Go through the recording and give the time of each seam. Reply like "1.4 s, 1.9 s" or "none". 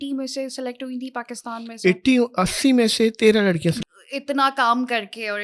3.8 s